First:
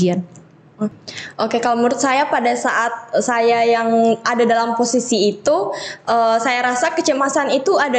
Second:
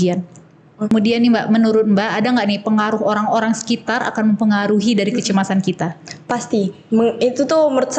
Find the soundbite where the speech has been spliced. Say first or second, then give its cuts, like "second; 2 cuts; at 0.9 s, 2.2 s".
second; 1 cut; at 0.9 s